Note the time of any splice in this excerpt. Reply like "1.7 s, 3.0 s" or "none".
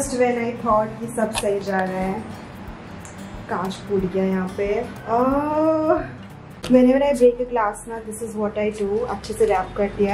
none